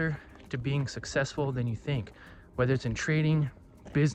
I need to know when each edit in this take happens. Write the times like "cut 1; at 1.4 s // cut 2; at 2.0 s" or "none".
none